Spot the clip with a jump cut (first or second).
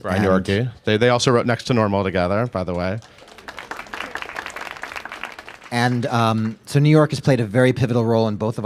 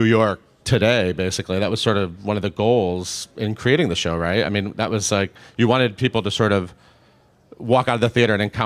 second